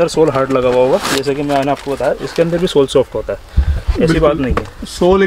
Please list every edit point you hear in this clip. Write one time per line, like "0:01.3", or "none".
none

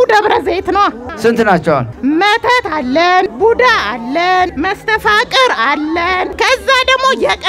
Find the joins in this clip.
0:01.1
0:01.9
0:03.3
0:04.5
0:06.3

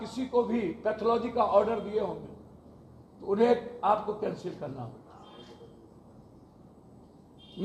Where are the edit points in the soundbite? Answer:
none

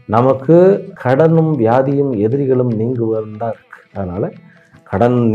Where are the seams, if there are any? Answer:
0:00.9

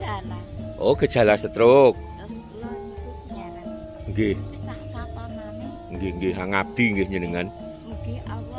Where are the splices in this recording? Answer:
none

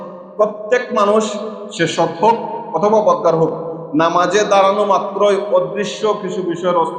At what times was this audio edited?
none

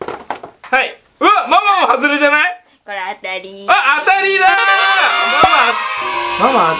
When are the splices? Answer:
none

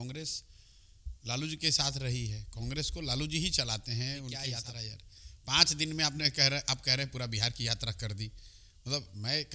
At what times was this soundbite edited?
0:04.5

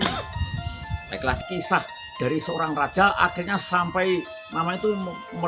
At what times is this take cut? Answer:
0:01.4

